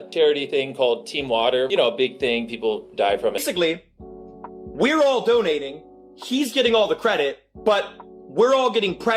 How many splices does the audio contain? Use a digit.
2